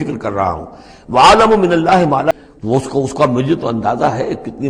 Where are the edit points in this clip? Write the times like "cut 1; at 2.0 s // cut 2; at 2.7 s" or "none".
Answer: cut 1; at 2.3 s

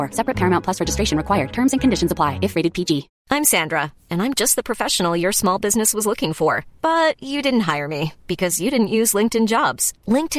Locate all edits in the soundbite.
cut 1; at 3.1 s

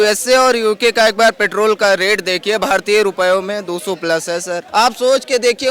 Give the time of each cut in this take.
cut 1; at 4.6 s

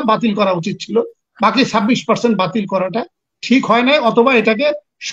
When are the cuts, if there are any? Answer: none

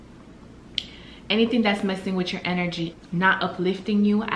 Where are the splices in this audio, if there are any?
cut 1; at 2.9 s

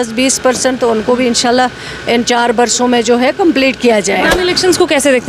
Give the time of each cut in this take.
cut 1; at 4.2 s

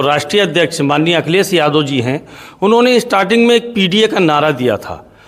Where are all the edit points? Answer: none

